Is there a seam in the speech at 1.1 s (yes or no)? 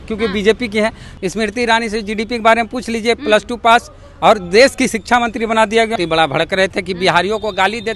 yes